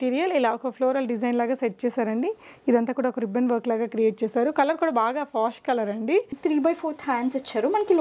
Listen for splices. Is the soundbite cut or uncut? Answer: cut